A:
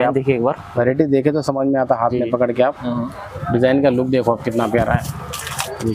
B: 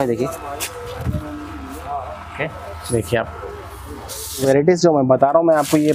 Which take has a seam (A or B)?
B